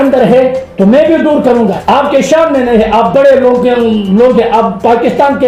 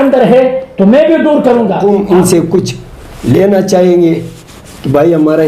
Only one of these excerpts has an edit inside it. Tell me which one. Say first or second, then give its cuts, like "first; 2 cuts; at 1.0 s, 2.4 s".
second; 1 cut; at 1.8 s